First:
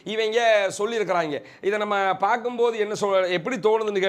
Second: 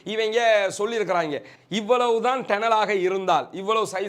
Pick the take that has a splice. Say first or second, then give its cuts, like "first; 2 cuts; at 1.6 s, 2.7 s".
second; 1 cut; at 1.5 s